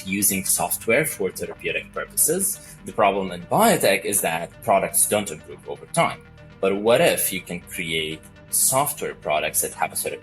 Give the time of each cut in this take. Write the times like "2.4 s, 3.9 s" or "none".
2.7 s